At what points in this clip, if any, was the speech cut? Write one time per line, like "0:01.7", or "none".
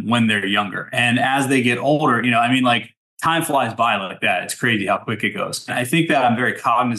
0:05.7